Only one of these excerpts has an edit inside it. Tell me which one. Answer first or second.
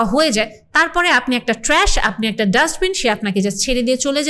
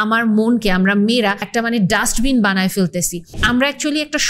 second